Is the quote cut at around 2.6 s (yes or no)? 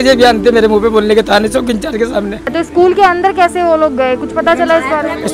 yes